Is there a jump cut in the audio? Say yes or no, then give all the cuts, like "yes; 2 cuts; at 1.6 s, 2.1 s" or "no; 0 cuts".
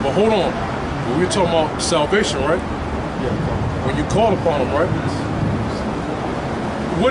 yes; 1 cut; at 6.1 s